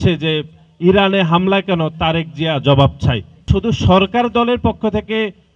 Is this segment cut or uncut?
cut